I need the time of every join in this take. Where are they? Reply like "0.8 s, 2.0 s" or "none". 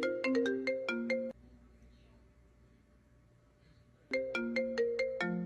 1.3 s